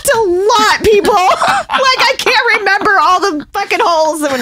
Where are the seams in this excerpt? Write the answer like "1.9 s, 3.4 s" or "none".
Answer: none